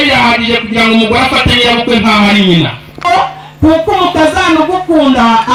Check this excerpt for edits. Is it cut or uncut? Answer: uncut